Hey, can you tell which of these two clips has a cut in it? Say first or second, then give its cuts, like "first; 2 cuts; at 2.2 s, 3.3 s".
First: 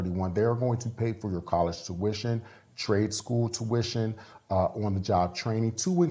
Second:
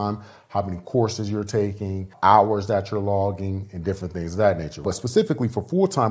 second; 2 cuts; at 2.1 s, 4.8 s